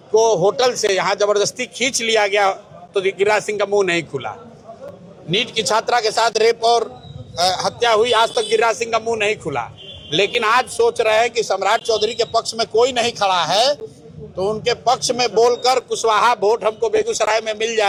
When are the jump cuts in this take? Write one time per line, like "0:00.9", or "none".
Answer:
none